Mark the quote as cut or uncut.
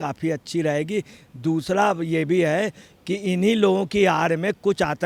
uncut